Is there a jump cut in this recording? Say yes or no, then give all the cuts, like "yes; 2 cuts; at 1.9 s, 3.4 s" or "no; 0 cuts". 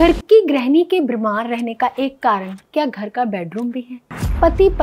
no; 0 cuts